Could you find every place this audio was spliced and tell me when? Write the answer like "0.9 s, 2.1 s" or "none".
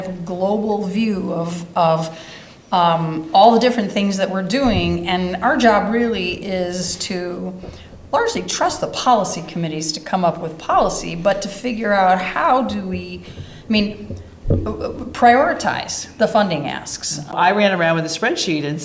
17.3 s